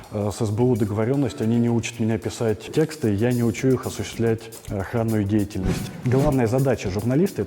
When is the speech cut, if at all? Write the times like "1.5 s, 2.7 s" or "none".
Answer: 2.7 s, 4.6 s, 5.8 s